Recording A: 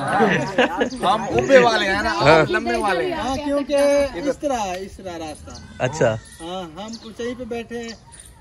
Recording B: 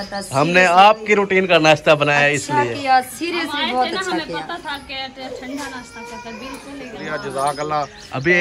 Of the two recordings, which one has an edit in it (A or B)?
B